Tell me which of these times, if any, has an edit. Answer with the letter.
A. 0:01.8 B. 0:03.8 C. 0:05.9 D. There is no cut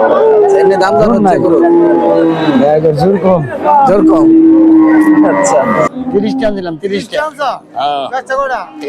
C